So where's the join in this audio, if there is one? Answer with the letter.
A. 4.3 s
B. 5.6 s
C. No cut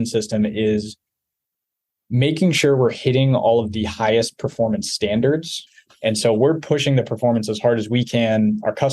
B